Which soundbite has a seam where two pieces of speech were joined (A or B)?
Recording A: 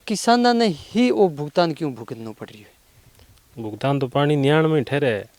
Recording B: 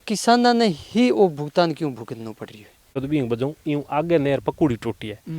B